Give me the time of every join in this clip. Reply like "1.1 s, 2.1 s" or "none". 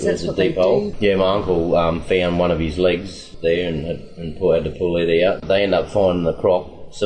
0.9 s, 3.2 s, 5.4 s